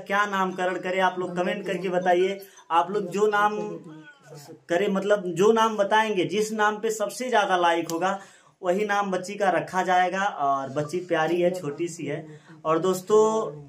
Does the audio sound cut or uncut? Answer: uncut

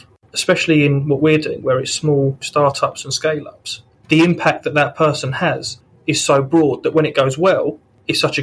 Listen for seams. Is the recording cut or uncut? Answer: uncut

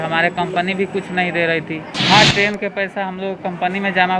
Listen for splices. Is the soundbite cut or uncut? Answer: cut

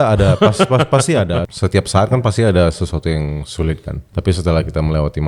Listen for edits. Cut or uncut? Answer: cut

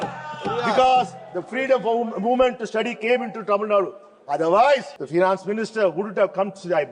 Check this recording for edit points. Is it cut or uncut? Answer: cut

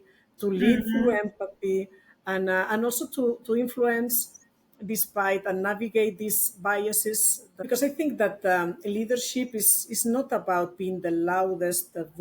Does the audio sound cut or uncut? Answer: cut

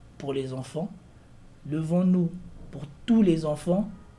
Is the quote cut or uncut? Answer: uncut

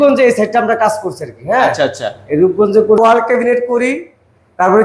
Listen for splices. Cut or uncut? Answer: cut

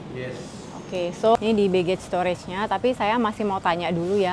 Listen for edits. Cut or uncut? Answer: cut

